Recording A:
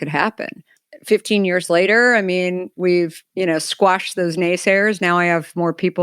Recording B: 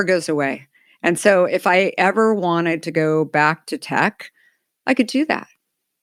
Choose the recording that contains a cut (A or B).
A